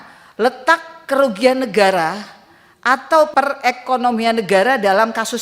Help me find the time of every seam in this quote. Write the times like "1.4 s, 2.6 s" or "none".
3.3 s